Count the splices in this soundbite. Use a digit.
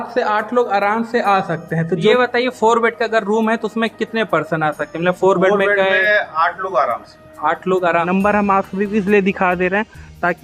2